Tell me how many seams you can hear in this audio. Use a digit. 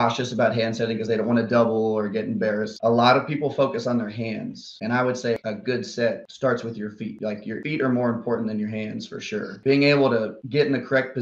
5